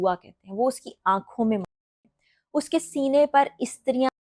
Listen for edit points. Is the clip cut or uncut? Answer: uncut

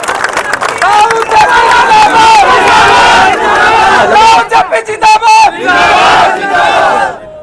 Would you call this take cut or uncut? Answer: uncut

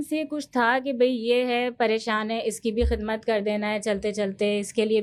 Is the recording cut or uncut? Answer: uncut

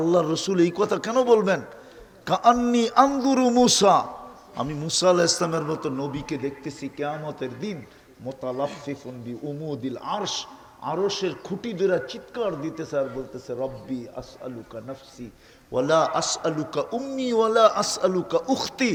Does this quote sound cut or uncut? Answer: uncut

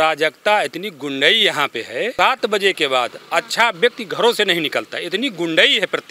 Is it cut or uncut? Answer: cut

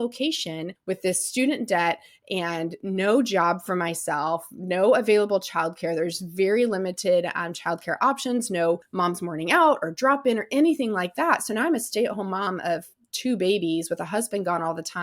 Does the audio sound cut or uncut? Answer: uncut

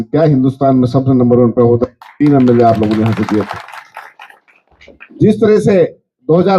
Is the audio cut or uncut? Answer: uncut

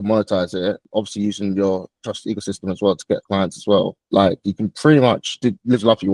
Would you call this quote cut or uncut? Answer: cut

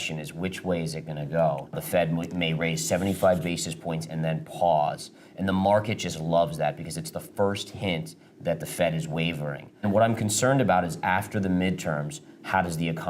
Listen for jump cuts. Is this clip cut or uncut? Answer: cut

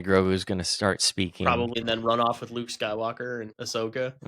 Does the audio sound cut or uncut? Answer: cut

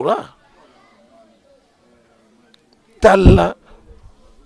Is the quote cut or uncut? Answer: uncut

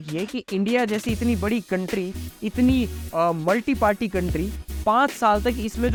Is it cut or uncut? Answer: uncut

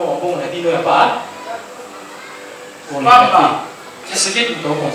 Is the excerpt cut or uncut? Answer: cut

